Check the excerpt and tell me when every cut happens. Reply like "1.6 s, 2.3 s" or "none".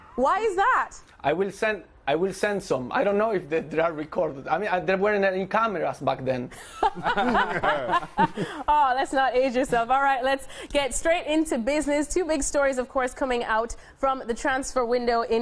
none